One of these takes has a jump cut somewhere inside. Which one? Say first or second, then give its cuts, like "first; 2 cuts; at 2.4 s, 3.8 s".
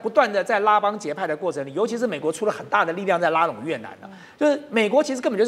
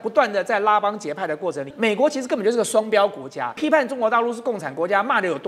second; 2 cuts; at 1.7 s, 3.6 s